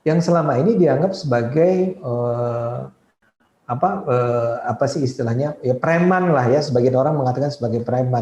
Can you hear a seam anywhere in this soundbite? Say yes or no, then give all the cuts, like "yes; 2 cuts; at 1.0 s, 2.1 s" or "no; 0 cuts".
no; 0 cuts